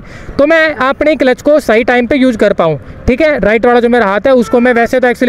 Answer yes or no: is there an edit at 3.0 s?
no